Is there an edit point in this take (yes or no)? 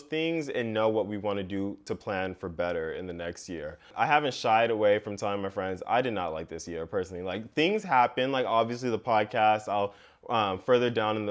yes